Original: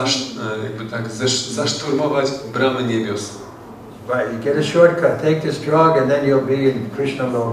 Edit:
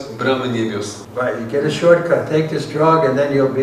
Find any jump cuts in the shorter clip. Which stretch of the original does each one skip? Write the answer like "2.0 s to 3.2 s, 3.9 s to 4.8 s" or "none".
3.3 s to 3.9 s